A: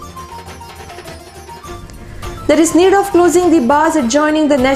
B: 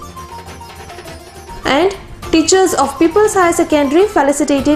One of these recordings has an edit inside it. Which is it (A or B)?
A